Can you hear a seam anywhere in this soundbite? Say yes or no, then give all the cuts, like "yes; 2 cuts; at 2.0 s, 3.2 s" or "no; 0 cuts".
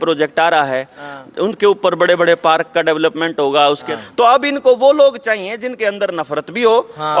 yes; 1 cut; at 3.9 s